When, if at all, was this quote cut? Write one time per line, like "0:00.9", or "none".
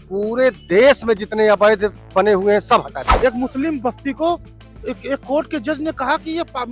0:03.0